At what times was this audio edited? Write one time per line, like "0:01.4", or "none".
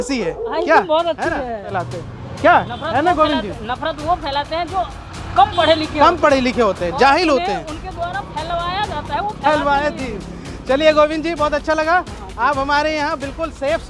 0:01.7